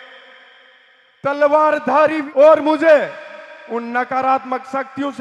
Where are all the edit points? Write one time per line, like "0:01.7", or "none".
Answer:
0:02.2